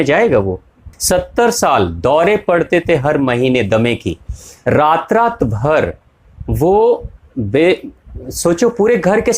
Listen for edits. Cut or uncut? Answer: cut